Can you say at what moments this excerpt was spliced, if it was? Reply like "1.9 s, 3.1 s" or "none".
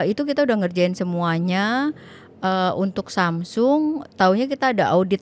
none